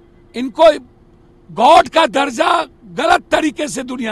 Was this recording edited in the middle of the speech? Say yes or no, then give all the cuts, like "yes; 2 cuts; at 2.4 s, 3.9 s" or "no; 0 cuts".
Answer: no; 0 cuts